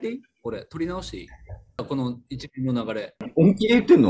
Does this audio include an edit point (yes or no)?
yes